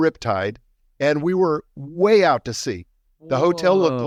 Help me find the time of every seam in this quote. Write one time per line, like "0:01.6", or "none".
none